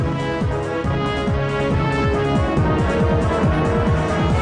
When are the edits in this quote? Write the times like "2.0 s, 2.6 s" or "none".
3.0 s